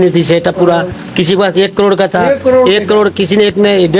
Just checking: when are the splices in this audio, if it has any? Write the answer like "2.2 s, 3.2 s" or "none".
none